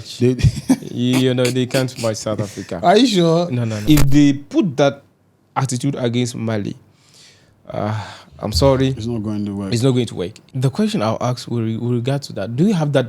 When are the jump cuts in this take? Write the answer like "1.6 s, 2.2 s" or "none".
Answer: 3.8 s, 10.4 s